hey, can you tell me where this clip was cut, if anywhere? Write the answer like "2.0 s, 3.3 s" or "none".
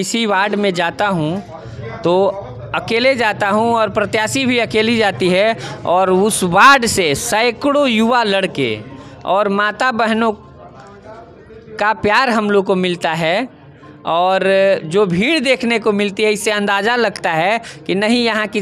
none